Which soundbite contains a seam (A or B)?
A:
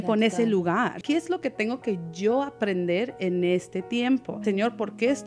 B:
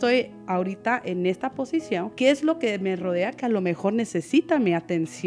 A